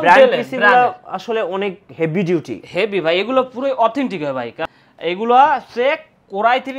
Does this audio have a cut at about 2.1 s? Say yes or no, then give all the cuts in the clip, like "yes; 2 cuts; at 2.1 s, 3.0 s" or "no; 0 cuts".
no; 1 cut; at 4.5 s